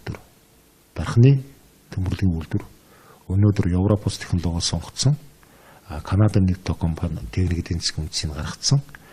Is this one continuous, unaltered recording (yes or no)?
no